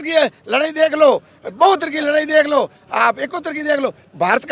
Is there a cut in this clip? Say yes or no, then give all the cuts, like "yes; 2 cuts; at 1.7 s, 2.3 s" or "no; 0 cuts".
no; 0 cuts